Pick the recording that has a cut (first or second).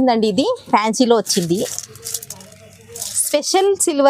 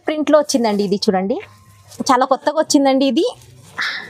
second